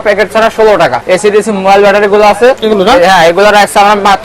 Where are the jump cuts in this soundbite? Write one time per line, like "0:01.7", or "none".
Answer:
0:01.0
0:02.6